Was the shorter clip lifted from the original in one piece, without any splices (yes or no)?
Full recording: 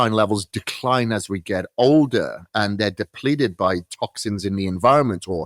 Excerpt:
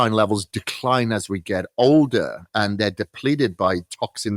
yes